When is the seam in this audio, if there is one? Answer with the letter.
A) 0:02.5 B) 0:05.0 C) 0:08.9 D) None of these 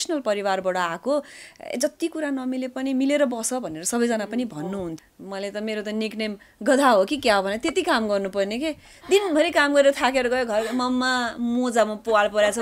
B